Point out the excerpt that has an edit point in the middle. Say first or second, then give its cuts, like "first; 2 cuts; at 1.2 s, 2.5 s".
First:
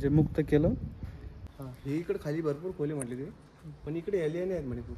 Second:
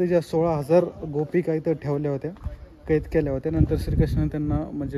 first; 1 cut; at 1.4 s